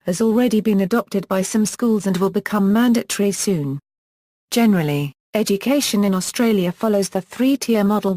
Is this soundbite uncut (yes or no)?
no